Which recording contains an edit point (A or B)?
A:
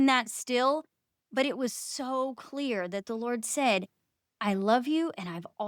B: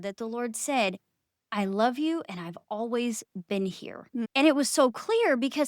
B